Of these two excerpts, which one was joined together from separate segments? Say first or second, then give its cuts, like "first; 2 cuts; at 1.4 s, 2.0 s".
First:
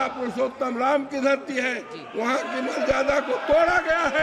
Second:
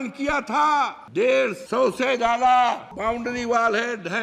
second; 3 cuts; at 1.0 s, 1.6 s, 2.9 s